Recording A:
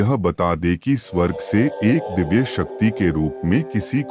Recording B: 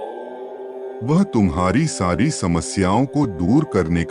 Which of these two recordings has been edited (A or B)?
B